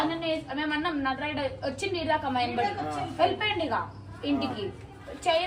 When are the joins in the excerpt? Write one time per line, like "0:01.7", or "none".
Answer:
none